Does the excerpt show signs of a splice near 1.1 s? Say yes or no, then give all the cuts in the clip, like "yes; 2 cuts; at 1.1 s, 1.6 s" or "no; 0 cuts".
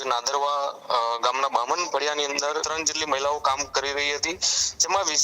no; 1 cut; at 2.7 s